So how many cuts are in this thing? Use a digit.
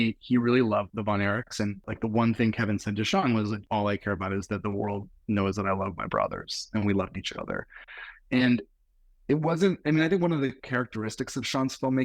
2